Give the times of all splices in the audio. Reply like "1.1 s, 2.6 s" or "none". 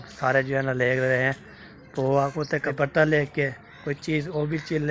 2.8 s